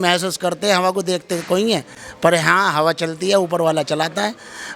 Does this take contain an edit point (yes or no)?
no